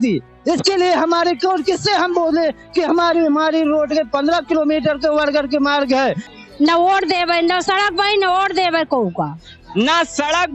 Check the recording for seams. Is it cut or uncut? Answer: cut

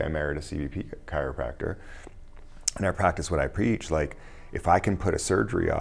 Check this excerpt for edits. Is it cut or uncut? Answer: uncut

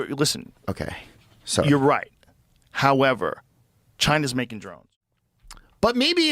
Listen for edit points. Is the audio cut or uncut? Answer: cut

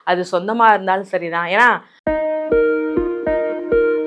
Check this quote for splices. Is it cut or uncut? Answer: cut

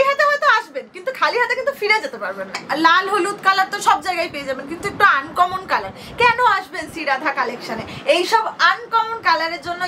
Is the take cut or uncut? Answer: cut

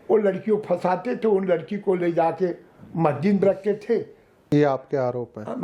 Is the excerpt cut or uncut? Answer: cut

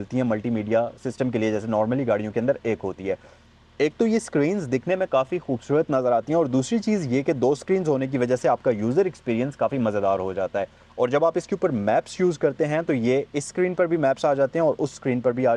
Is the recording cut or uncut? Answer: uncut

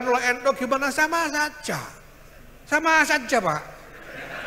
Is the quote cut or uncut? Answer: uncut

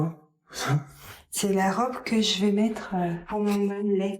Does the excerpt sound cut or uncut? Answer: cut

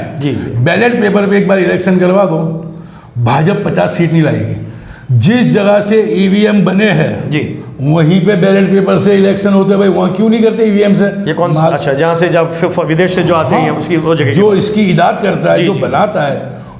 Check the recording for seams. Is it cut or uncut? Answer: uncut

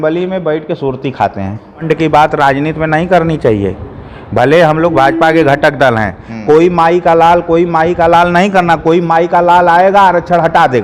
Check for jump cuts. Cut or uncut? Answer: cut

